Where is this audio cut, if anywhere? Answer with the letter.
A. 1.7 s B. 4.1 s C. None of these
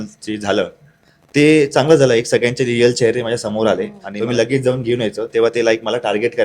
B